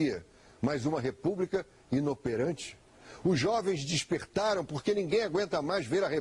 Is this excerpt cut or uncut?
cut